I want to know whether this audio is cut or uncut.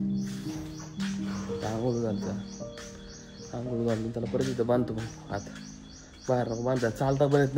uncut